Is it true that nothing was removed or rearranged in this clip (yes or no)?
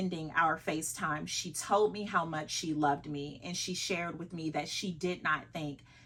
yes